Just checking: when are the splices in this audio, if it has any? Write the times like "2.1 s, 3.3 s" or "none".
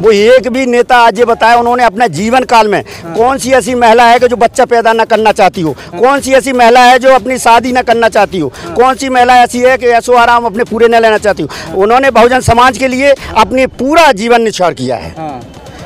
none